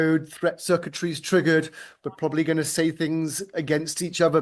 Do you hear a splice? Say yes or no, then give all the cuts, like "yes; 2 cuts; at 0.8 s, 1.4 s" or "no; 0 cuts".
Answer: no; 0 cuts